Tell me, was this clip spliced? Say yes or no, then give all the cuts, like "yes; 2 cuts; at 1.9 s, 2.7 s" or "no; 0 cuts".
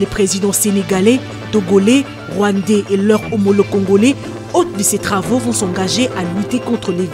no; 0 cuts